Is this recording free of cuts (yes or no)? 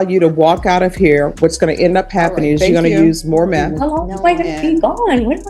no